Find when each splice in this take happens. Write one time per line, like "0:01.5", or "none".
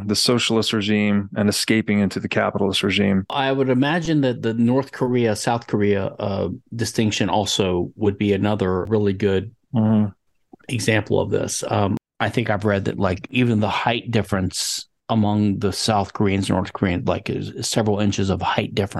0:03.3
0:08.9
0:12.0
0:13.3